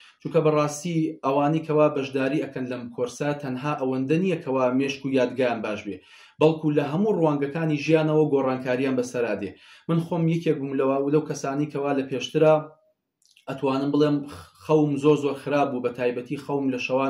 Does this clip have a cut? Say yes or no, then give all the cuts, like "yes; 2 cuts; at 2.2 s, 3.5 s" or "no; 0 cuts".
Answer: no; 0 cuts